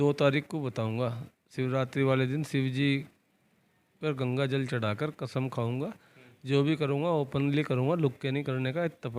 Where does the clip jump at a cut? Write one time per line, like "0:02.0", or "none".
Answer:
none